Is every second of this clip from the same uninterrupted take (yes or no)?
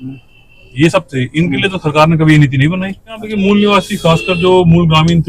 no